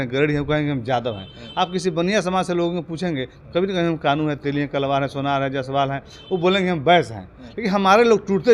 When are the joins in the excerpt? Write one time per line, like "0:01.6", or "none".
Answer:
none